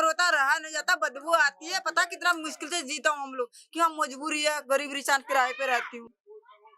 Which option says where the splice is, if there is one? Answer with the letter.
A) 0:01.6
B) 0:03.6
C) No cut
C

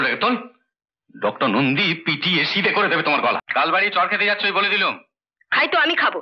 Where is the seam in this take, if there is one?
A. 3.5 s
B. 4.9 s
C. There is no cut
A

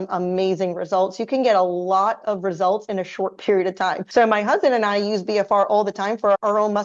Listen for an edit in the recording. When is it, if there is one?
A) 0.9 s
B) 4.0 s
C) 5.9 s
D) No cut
B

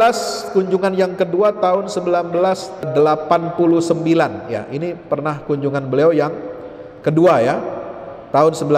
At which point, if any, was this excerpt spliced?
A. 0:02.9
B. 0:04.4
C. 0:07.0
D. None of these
A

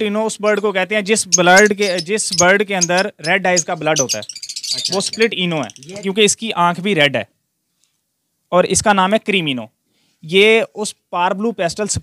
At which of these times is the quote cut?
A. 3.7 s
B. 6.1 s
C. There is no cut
B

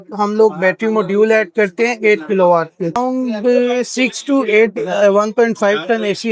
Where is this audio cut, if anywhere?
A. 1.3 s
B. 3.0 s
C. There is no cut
B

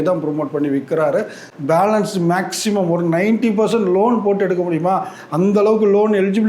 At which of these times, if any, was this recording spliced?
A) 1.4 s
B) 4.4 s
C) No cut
A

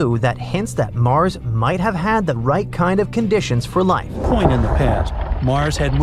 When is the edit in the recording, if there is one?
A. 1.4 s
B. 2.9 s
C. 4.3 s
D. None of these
C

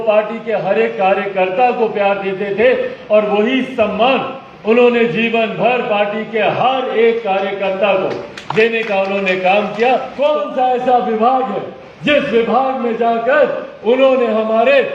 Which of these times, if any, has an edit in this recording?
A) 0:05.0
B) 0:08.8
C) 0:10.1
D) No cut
C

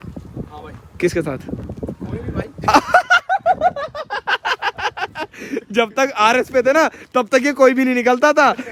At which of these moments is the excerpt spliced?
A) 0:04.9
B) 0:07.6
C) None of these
C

